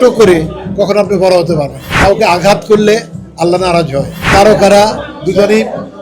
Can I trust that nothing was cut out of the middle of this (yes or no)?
no